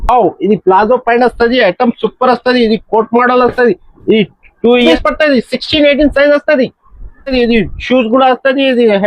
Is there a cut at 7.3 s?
yes; 2 cuts; at 4.9 s, 7.3 s

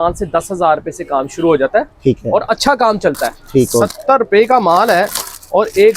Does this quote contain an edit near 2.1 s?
no; 1 cut; at 3.8 s

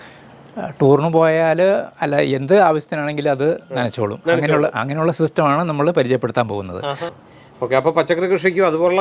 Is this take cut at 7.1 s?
yes; 1 cut; at 7.1 s

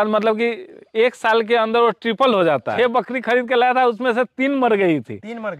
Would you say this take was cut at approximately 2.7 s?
yes; 1 cut; at 2.7 s

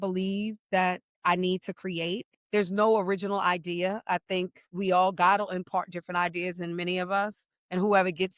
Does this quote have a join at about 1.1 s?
yes; 2 cuts; at 1.1 s, 2.3 s

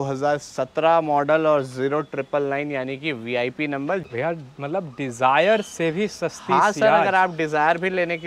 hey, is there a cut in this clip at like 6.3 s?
no; 1 cut; at 4.1 s

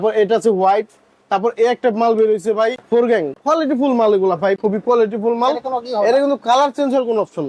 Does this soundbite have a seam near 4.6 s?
yes; 2 cuts; at 3.0 s, 4.6 s

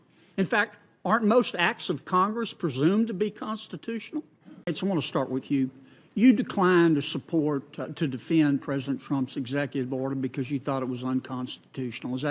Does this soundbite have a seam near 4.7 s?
yes; 1 cut; at 4.7 s

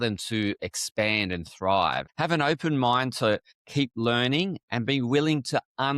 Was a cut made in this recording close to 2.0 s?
yes; 2 cuts; at 2.0 s, 3.6 s

